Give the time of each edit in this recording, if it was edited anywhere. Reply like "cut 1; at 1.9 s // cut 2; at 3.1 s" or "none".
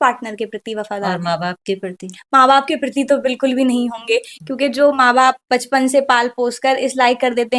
none